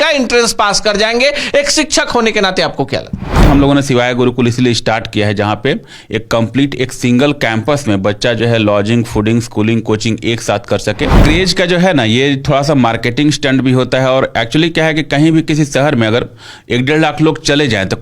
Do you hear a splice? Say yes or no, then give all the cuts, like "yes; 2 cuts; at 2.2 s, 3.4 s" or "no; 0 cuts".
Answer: yes; 2 cuts; at 3.5 s, 11.2 s